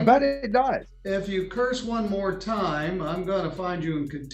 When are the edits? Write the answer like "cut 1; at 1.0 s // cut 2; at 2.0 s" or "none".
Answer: cut 1; at 0.9 s